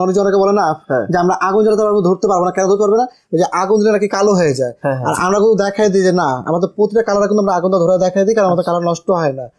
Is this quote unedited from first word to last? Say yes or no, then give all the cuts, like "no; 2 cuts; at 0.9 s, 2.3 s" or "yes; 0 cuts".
yes; 0 cuts